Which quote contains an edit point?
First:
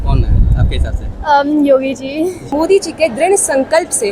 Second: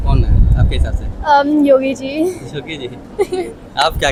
first; 1 cut; at 2.5 s

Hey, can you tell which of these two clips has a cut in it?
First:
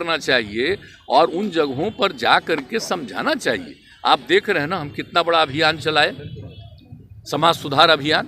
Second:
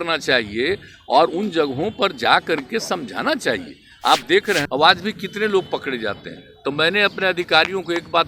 second; 1 cut; at 4.7 s

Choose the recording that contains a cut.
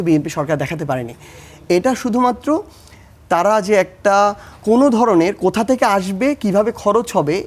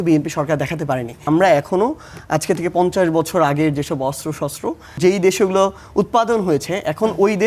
second; 2 cuts; at 1.2 s, 5.0 s

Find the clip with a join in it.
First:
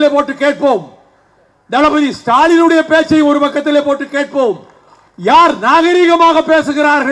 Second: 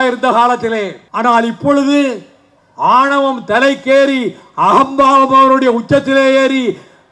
second; 1 cut; at 1.0 s

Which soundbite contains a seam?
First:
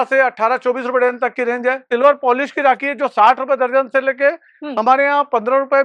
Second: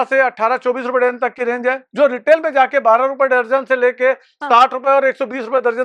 first; 1 cut; at 1.9 s

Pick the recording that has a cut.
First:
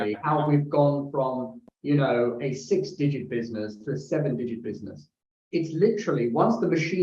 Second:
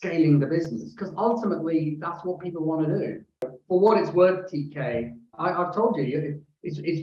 second; 2 cuts; at 3.4 s, 5.3 s

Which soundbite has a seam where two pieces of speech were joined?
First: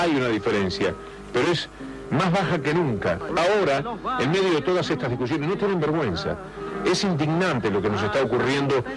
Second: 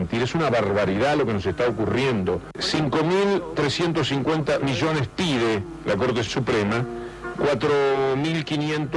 first; 1 cut; at 3.2 s

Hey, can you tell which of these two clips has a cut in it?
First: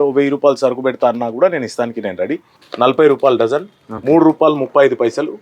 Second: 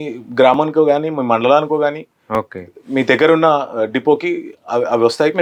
first; 1 cut; at 2.4 s

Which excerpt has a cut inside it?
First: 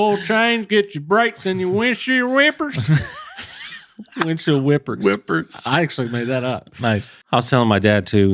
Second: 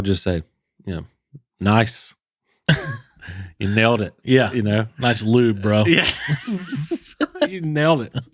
first; 1 cut; at 7.1 s

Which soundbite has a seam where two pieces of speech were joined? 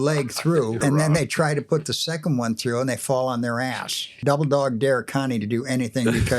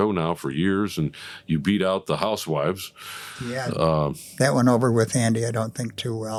first; 2 cuts; at 0.8 s, 4.0 s

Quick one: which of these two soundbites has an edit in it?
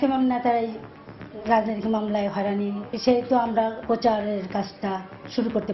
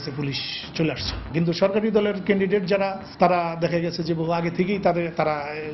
first; 1 cut; at 2.9 s

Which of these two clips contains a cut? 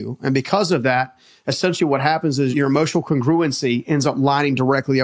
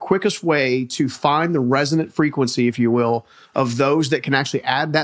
first; 1 cut; at 2.5 s

